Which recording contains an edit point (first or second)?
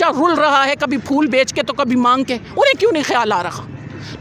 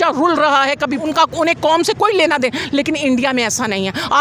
second